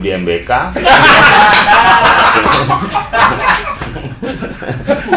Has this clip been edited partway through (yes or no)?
no